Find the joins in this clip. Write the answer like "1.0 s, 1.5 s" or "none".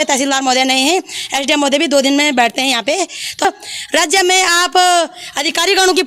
3.4 s